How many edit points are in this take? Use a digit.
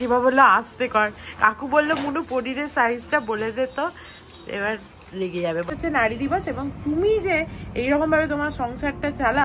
1